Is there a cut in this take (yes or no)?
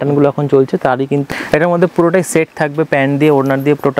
yes